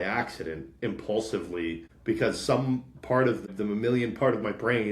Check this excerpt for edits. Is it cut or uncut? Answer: cut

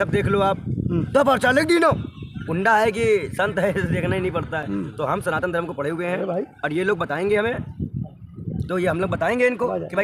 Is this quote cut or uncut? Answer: uncut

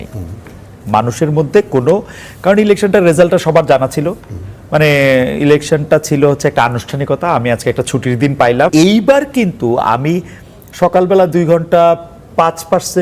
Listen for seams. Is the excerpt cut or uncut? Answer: cut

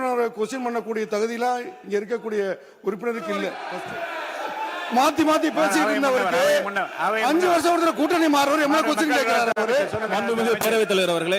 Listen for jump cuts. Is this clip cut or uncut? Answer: cut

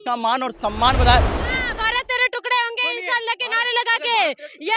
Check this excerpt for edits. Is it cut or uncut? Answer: uncut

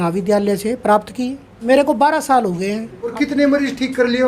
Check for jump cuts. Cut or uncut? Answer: cut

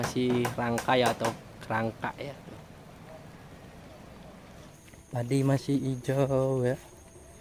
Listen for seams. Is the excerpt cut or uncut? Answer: cut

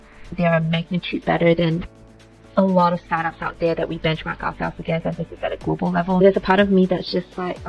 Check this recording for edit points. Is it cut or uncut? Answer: cut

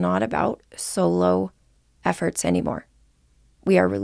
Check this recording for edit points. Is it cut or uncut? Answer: uncut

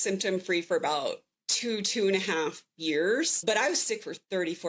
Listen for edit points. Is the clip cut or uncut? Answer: cut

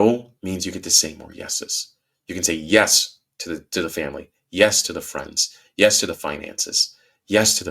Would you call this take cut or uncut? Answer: uncut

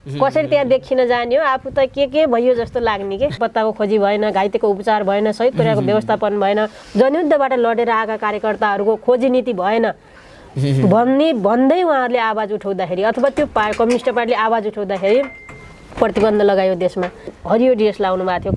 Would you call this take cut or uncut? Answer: cut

